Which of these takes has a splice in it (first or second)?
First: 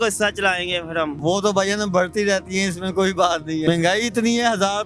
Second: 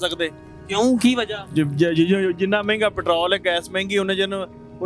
first